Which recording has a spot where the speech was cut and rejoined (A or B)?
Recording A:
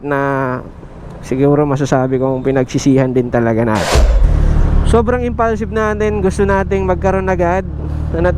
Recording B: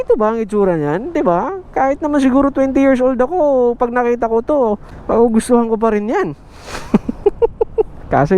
A